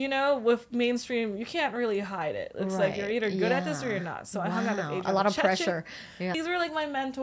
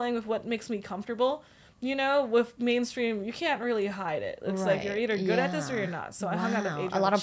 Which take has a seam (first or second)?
first